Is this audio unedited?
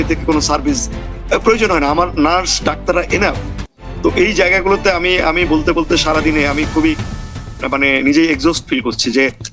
yes; 0 cuts

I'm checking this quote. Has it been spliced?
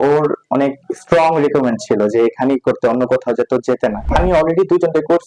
yes; 1 cut; at 4.1 s

